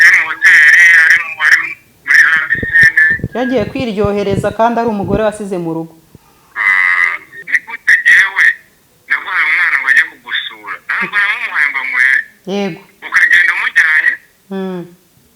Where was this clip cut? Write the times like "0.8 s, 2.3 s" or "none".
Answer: 7.5 s